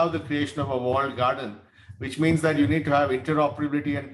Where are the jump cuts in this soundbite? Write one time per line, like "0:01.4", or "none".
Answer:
none